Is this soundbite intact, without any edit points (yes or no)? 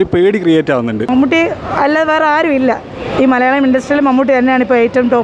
no